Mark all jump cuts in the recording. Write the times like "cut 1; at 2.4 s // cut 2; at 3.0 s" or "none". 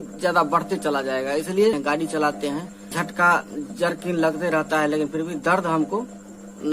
cut 1; at 1.8 s // cut 2; at 2.9 s